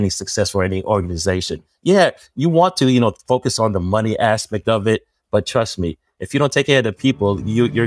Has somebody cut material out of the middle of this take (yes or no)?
no